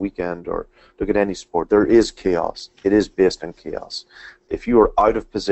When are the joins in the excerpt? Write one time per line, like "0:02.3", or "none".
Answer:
0:01.7
0:04.3